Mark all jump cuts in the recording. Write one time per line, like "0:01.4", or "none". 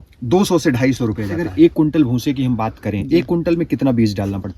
0:01.4